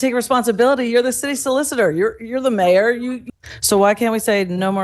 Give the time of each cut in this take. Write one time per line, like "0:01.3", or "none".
0:03.2

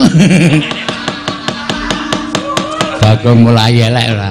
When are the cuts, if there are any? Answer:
none

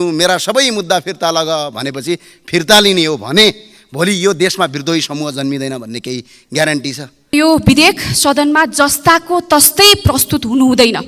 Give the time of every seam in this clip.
0:07.3

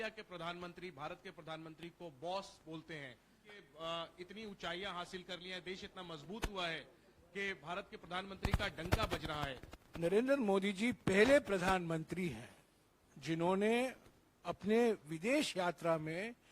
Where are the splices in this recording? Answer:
0:03.6
0:09.7

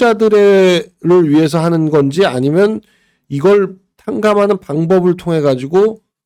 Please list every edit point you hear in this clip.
none

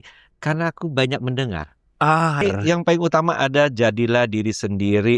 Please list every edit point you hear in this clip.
0:02.4

